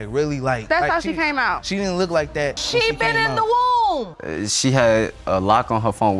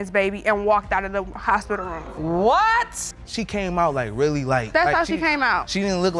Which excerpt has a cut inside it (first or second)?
first